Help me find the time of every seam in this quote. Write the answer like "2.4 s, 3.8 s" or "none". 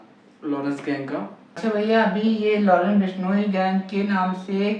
1.4 s